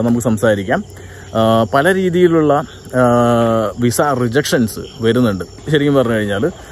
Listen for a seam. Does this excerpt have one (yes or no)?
no